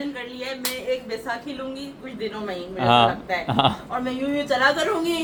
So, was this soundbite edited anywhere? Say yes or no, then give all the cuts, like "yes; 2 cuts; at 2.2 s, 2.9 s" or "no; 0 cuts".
no; 0 cuts